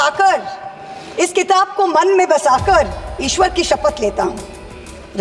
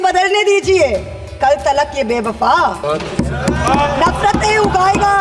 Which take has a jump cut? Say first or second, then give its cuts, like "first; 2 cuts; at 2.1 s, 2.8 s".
second; 1 cut; at 2.8 s